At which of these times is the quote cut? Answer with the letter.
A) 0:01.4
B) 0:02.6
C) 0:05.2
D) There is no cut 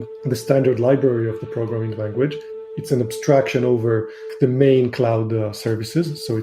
B